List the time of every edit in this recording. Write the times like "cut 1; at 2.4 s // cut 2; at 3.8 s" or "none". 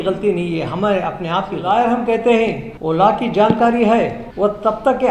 cut 1; at 1.6 s // cut 2; at 2.7 s // cut 3; at 4.2 s